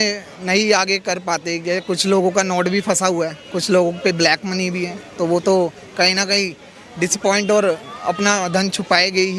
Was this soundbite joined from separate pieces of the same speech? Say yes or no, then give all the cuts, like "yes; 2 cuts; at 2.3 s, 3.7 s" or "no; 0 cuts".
no; 0 cuts